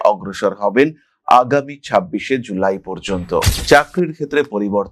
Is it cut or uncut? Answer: cut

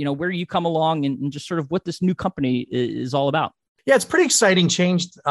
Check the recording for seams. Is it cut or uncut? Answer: cut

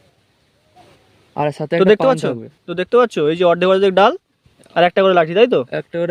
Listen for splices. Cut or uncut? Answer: uncut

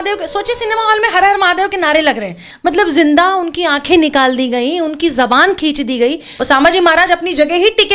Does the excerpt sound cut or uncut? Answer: cut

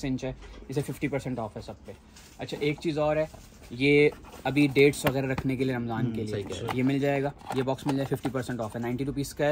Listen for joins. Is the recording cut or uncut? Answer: uncut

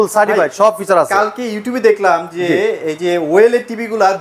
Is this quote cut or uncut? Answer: uncut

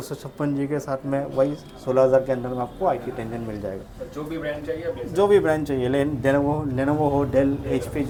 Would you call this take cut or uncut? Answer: uncut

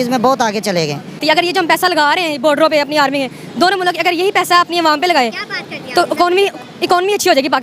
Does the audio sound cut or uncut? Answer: cut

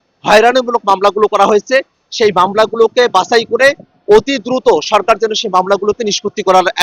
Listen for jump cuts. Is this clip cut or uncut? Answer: uncut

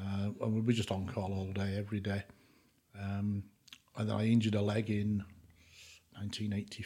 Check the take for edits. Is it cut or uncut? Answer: uncut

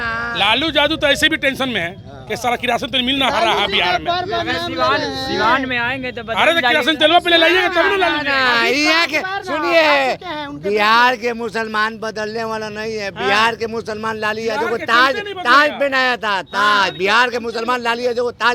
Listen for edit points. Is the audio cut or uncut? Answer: uncut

